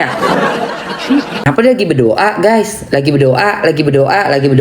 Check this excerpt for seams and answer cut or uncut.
cut